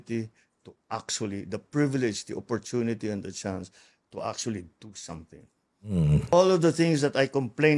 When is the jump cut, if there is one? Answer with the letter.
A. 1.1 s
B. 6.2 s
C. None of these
B